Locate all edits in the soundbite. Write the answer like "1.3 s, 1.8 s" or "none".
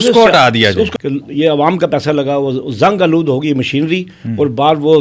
0.9 s